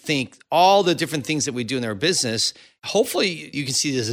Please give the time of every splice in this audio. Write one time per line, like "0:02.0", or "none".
0:02.7